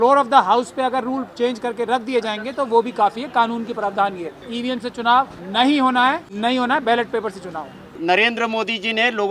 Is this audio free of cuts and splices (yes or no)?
no